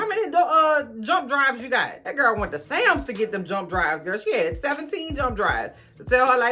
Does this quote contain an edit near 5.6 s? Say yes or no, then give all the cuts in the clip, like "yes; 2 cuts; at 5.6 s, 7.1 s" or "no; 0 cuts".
no; 1 cut; at 2.0 s